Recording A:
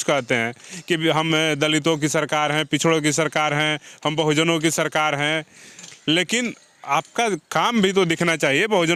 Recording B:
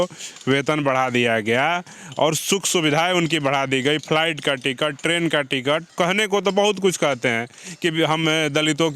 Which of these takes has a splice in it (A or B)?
B